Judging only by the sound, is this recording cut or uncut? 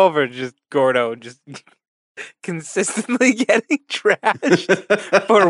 uncut